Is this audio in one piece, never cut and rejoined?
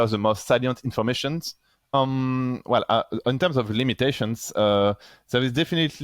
no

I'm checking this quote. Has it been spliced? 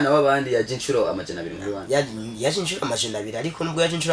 no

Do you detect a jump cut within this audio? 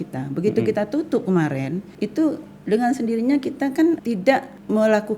yes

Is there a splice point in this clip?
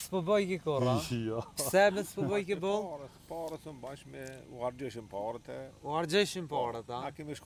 no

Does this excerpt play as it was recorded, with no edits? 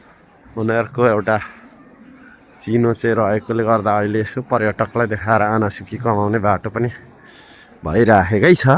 yes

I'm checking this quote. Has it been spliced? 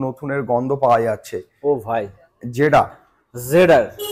no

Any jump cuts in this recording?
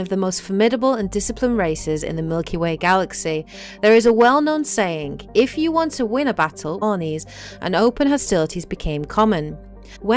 no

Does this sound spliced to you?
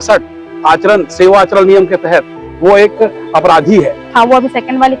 yes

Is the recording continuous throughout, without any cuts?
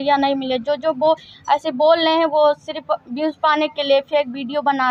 yes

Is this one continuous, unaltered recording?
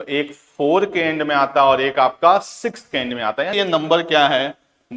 no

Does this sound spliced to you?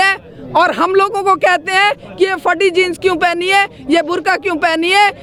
no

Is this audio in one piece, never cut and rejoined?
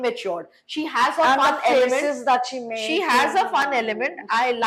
yes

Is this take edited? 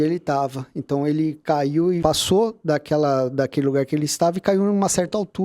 yes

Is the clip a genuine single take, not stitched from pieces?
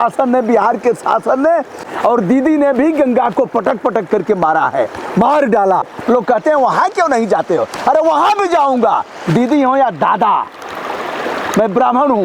no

